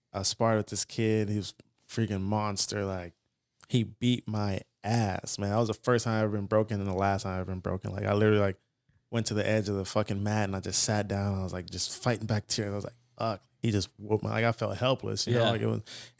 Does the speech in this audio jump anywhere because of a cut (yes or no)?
no